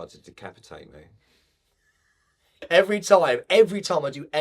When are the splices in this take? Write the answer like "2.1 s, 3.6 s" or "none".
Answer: 2.5 s